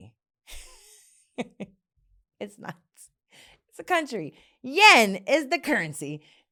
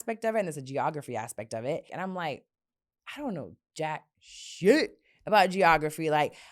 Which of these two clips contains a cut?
second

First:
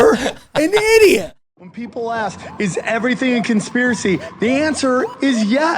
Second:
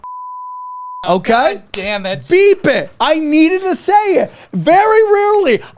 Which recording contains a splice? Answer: first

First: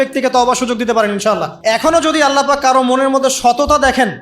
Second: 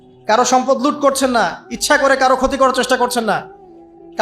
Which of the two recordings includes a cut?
first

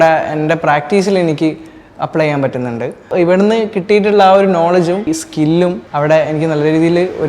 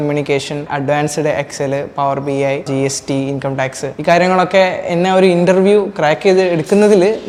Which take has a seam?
first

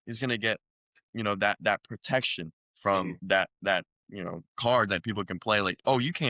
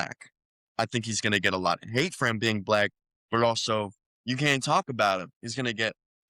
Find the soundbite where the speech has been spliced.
first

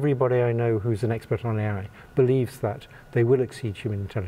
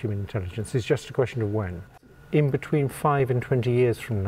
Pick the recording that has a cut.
second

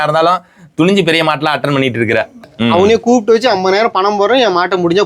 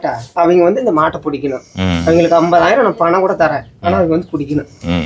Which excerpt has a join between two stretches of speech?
first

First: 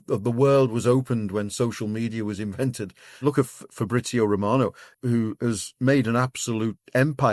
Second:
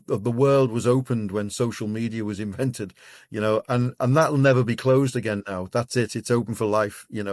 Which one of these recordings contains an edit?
first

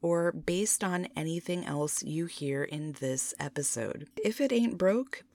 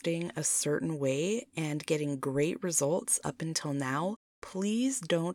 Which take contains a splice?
first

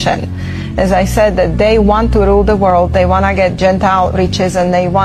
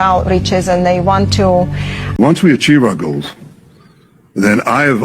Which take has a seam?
second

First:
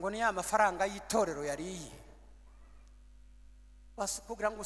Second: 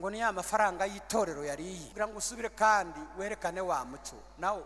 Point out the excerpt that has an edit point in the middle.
second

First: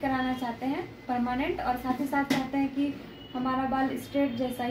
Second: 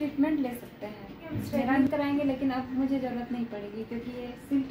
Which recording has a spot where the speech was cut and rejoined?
second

